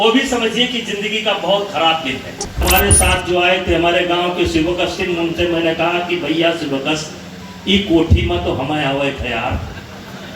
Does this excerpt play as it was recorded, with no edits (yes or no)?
no